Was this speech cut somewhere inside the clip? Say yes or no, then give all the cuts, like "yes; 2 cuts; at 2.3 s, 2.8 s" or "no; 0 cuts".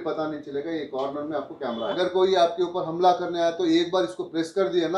yes; 1 cut; at 2.0 s